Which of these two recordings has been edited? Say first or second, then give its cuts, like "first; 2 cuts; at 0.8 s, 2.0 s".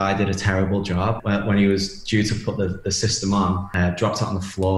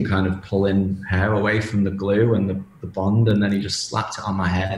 first; 2 cuts; at 1.2 s, 3.7 s